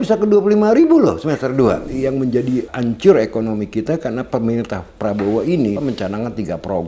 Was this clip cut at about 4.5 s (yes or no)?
no